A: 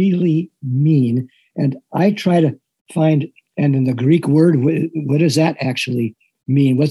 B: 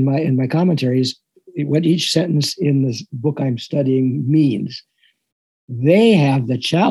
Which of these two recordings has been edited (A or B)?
B